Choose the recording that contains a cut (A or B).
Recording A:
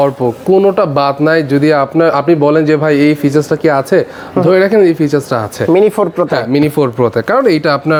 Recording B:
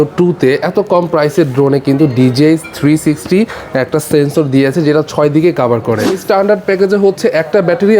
B